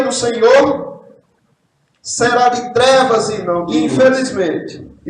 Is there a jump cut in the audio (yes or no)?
yes